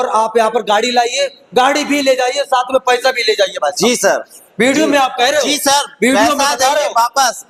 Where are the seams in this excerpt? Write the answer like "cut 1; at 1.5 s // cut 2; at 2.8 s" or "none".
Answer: none